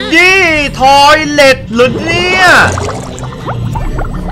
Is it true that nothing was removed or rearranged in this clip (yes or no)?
yes